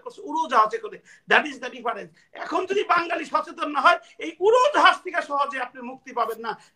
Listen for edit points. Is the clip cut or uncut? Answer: uncut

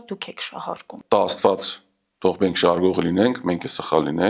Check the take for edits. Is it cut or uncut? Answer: cut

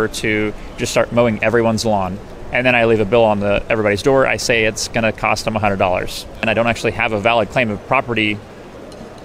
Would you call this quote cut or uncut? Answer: cut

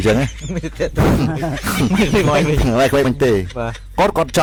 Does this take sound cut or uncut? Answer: uncut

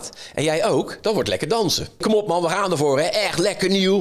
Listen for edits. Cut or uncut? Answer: cut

